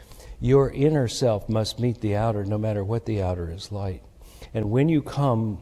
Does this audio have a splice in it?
no; 0 cuts

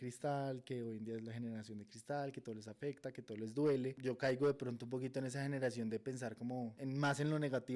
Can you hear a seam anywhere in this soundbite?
yes; 2 cuts; at 4.0 s, 6.8 s

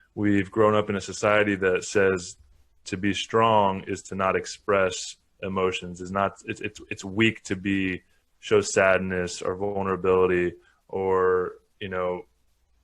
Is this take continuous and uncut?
yes; 0 cuts

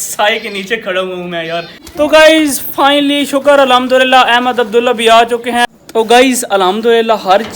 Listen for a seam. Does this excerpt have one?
yes; 2 cuts; at 1.8 s, 5.6 s

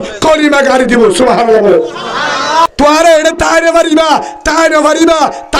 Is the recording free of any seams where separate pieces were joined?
no; 1 cut; at 2.6 s

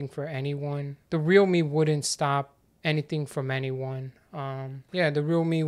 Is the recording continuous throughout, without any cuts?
no; 3 cuts; at 1.0 s, 2.6 s, 4.8 s

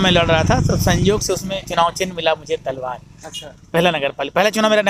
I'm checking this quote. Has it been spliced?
no; 0 cuts

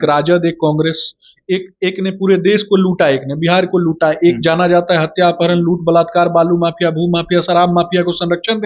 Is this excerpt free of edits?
yes; 0 cuts

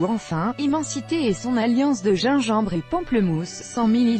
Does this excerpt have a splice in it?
no; 0 cuts

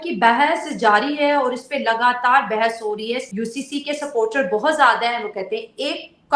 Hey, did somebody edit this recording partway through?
yes; 1 cut; at 3.3 s

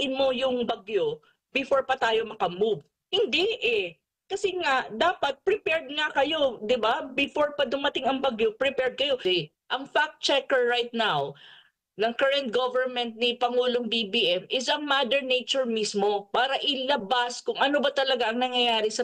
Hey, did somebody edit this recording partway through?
yes; 1 cut; at 9.2 s

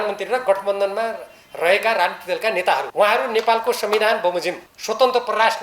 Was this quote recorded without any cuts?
no; 2 cuts; at 2.9 s, 4.7 s

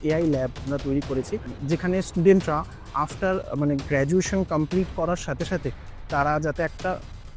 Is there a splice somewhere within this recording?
yes; 1 cut; at 1.5 s

